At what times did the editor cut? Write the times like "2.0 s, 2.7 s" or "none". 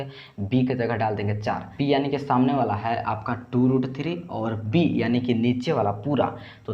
1.7 s